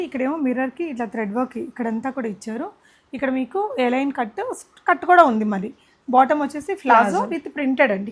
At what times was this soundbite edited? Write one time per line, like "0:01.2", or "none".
none